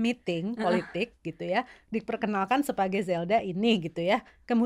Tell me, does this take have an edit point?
no; 0 cuts

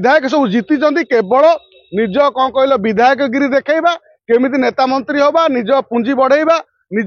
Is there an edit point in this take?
no; 0 cuts

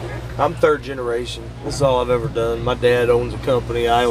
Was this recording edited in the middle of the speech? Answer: no; 0 cuts

